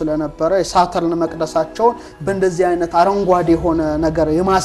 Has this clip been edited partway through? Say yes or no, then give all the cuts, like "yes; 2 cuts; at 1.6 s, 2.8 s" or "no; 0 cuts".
no; 0 cuts